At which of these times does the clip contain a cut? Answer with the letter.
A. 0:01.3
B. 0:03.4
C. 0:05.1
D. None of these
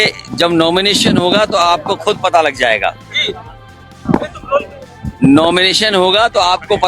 D